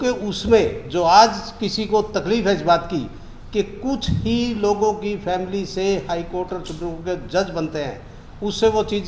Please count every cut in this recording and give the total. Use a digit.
0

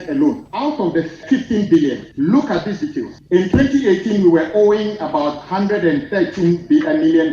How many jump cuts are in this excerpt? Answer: 3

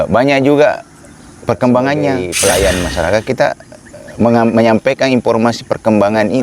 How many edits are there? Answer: 1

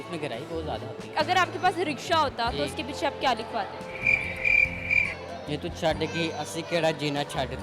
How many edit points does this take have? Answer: 1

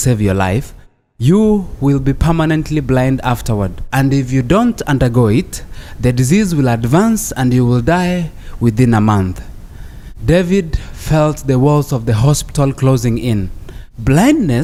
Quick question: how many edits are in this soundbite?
0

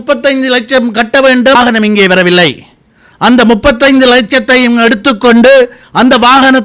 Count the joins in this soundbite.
1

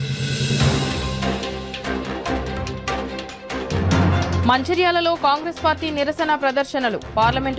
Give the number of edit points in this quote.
1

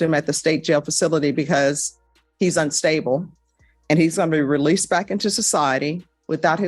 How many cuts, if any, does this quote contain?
1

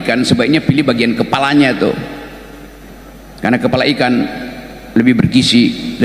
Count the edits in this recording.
0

